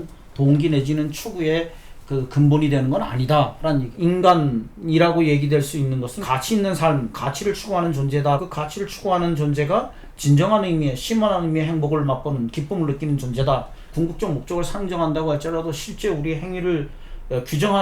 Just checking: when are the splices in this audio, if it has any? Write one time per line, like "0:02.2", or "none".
0:03.9
0:06.2
0:08.4
0:13.9